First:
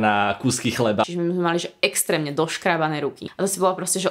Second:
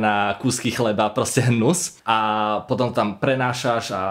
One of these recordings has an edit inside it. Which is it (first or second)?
first